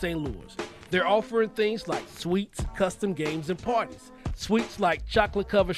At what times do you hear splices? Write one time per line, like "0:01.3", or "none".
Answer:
none